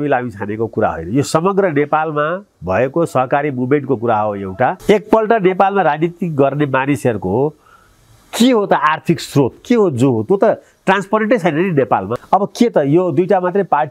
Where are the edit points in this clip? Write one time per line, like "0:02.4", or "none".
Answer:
0:04.8
0:12.1